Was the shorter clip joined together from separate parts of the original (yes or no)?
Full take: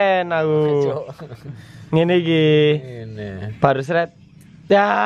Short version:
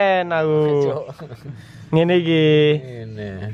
no